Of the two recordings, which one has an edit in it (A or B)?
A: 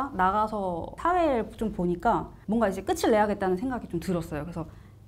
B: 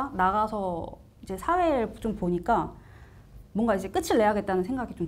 A